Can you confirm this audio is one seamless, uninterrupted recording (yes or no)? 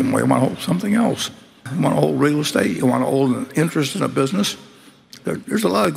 no